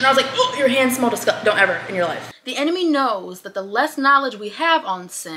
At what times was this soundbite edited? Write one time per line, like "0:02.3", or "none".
0:02.3